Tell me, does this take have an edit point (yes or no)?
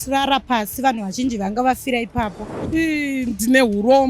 yes